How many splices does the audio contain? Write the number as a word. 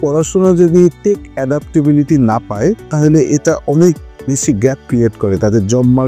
zero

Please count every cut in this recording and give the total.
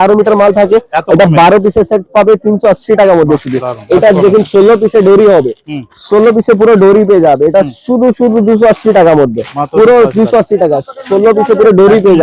zero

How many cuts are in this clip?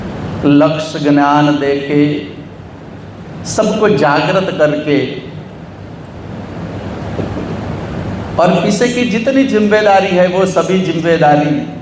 zero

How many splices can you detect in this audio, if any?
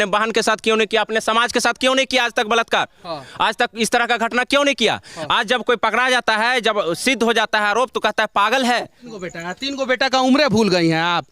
one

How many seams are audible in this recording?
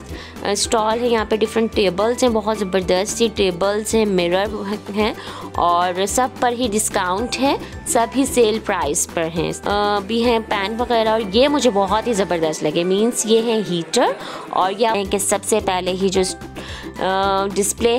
two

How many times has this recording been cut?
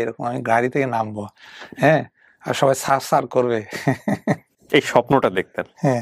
zero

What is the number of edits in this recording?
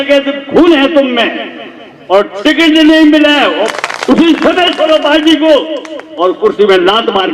one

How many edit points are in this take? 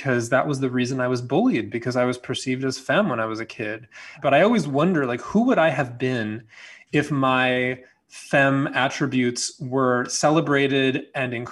one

